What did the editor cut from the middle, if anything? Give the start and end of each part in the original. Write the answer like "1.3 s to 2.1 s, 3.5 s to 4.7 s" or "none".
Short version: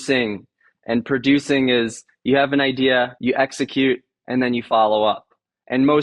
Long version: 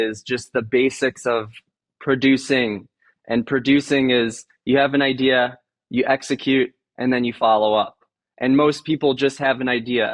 5.6 s to 5.8 s